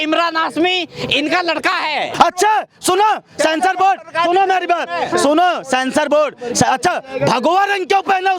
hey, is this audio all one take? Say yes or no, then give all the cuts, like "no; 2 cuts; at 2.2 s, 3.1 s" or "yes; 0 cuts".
no; 1 cut; at 2.1 s